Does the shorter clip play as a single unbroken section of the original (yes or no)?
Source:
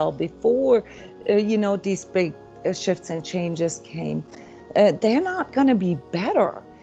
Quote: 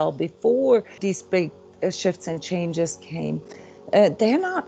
no